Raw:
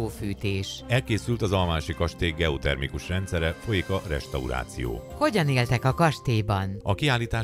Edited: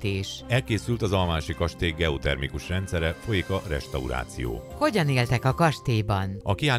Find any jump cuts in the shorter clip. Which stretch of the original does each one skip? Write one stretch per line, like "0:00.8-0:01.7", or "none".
none